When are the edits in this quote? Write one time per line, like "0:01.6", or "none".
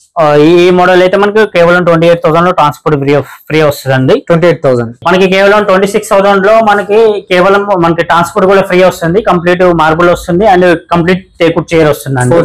0:05.0